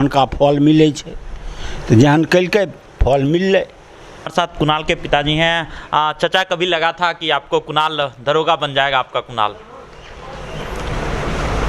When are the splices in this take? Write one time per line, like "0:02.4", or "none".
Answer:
none